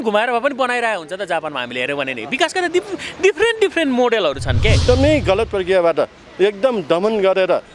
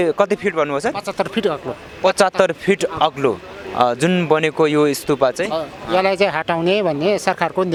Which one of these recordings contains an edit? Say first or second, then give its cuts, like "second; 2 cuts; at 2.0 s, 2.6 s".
first; 1 cut; at 4.8 s